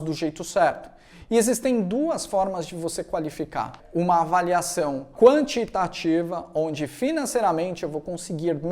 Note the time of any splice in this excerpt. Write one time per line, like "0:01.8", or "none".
0:03.8
0:05.1